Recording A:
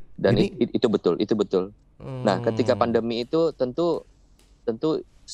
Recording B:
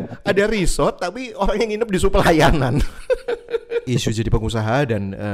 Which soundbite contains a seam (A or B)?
B